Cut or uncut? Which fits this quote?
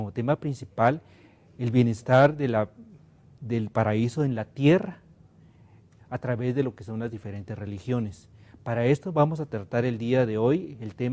cut